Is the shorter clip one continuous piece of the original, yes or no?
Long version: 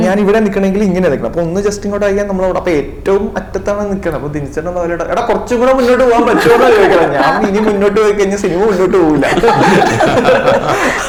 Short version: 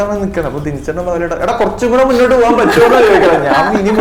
yes